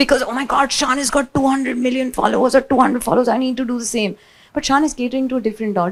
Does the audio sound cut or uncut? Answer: uncut